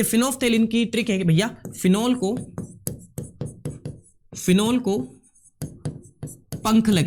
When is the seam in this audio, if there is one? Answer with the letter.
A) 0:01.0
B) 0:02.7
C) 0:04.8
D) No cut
D